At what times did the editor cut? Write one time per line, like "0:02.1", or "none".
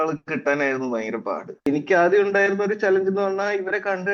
0:01.7